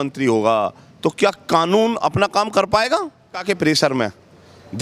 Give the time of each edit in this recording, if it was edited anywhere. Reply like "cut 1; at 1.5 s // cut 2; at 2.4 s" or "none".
cut 1; at 3.4 s